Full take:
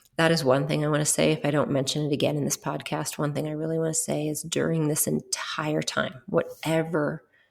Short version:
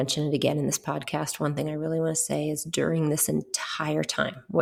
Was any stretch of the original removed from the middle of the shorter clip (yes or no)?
no